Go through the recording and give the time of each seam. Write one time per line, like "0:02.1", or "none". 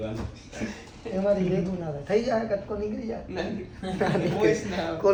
none